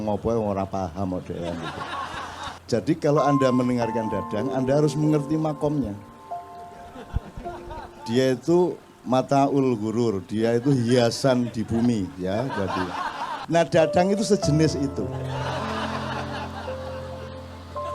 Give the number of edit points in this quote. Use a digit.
2